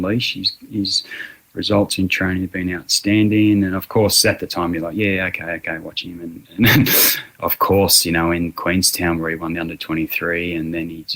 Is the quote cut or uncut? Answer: uncut